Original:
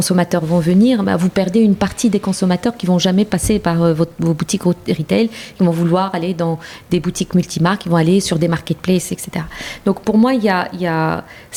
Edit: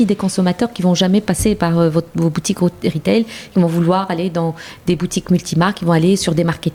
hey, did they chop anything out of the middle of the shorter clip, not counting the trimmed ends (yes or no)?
no